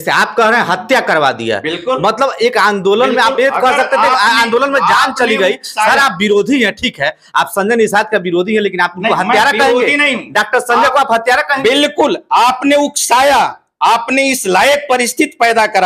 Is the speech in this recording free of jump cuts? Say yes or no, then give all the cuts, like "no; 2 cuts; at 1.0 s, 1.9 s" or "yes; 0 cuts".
yes; 0 cuts